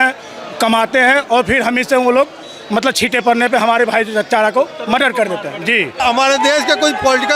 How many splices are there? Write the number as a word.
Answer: one